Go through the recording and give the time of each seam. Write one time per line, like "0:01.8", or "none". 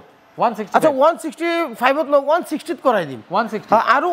none